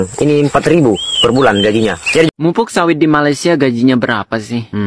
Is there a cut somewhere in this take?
yes; 1 cut; at 2.3 s

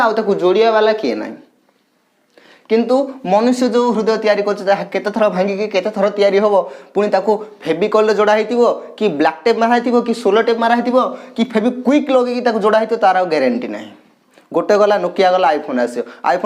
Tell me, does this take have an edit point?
no; 0 cuts

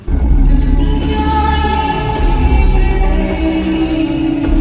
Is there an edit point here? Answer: no; 0 cuts

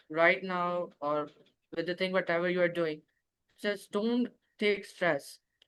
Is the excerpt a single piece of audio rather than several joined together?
yes; 0 cuts

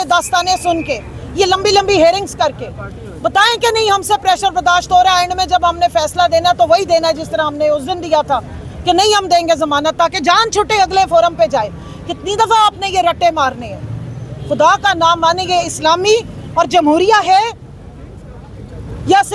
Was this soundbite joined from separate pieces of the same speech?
no; 0 cuts

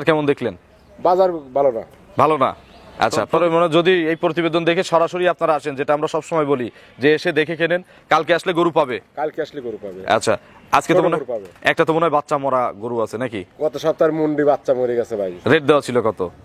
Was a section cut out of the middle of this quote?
yes; 1 cut; at 3.3 s

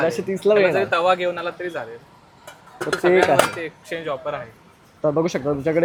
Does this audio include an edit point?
no; 0 cuts

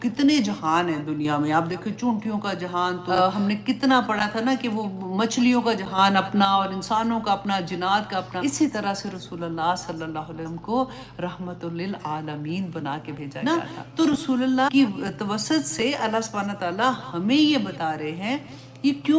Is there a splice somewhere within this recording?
yes; 4 cuts; at 3.0 s, 8.3 s, 13.3 s, 14.7 s

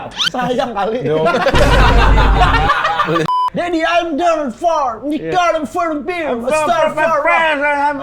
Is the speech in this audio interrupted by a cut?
yes; 1 cut; at 3.3 s

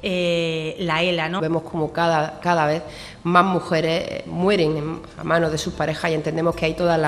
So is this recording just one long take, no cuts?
no; 1 cut; at 1.4 s

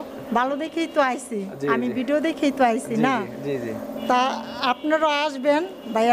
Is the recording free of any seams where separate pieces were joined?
yes; 0 cuts

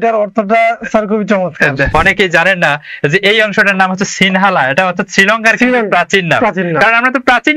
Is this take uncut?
no; 1 cut; at 1.9 s

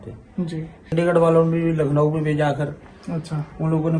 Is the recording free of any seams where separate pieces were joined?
no; 1 cut; at 1.0 s

